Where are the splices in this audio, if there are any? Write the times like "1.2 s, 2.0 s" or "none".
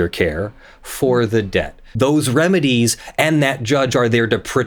1.8 s